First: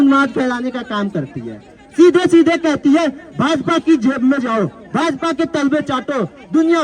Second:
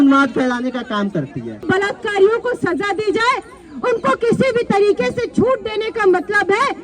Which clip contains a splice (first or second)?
second